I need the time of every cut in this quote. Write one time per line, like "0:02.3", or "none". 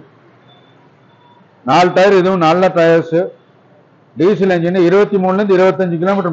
none